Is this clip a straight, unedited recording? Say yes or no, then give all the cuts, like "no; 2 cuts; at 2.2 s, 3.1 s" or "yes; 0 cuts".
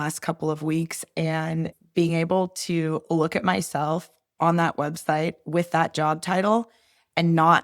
no; 1 cut; at 1.8 s